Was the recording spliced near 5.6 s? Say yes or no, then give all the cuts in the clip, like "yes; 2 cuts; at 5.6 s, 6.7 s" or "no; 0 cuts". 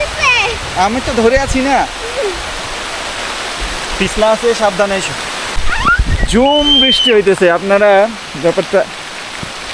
yes; 1 cut; at 5.6 s